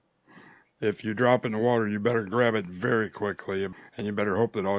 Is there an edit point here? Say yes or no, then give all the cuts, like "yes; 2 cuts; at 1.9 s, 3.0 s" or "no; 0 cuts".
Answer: yes; 1 cut; at 3.7 s